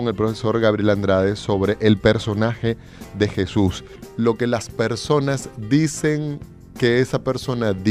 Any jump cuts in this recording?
no; 0 cuts

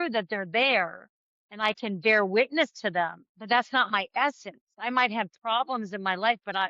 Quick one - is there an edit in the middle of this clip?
yes; 1 cut; at 3.3 s

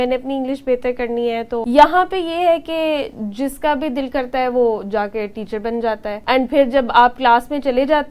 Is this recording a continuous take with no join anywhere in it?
no; 2 cuts; at 1.6 s, 6.2 s

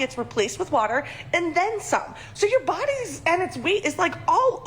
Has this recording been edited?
yes; 1 cut; at 2.8 s

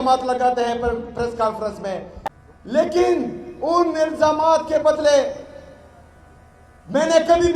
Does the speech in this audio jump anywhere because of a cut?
yes; 1 cut; at 2.4 s

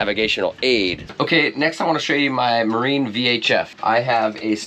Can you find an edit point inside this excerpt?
yes; 2 cuts; at 1.0 s, 3.7 s

